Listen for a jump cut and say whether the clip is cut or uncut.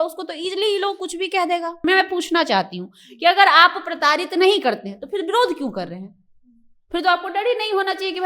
cut